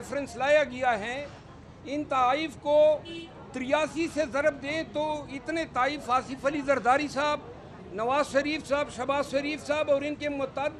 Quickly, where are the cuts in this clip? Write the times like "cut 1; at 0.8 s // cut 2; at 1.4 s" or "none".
none